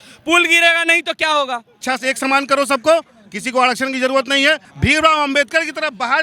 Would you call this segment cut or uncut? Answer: cut